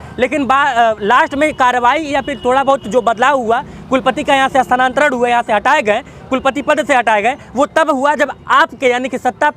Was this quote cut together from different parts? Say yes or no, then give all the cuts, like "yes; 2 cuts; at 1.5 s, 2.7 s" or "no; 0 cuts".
no; 0 cuts